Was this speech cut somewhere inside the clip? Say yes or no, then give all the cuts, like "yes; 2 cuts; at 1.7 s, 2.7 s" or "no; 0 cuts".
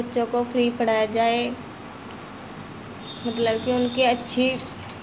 no; 0 cuts